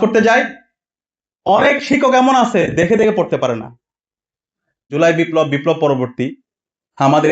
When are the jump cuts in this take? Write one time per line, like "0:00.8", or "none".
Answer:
0:04.9